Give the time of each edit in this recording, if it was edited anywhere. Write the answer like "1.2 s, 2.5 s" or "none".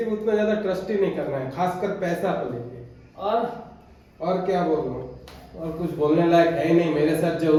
none

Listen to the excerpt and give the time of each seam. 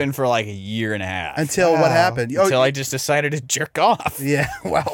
none

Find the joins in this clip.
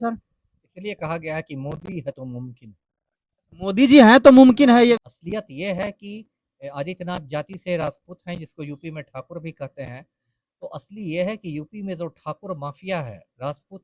5.1 s

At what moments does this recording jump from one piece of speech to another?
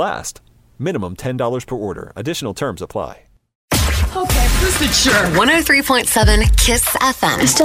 3.5 s

